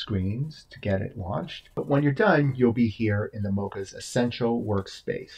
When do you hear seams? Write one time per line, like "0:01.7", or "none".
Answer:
0:01.6